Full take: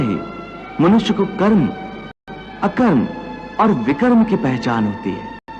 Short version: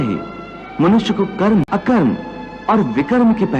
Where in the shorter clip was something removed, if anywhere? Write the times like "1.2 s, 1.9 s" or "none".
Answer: 1.6 s